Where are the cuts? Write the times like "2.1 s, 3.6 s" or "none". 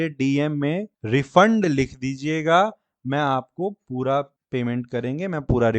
0.9 s, 4.4 s